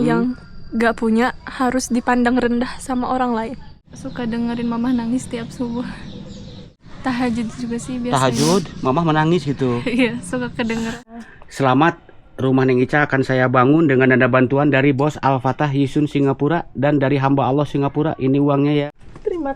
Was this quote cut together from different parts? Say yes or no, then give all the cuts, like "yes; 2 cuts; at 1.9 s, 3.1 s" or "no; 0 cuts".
yes; 4 cuts; at 3.8 s, 6.8 s, 11.0 s, 18.9 s